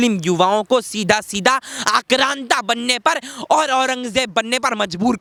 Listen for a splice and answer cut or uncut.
uncut